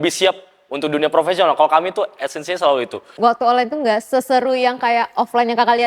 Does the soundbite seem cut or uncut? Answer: cut